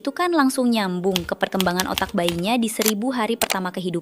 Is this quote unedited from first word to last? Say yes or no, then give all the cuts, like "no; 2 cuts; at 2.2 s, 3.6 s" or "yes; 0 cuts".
yes; 0 cuts